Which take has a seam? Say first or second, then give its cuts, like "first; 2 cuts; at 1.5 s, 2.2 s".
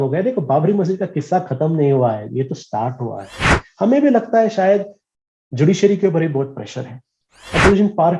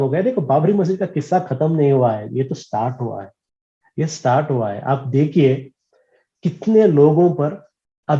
first; 2 cuts; at 3.7 s, 7.1 s